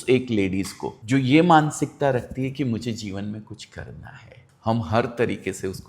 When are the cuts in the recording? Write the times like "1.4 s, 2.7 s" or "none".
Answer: 4.4 s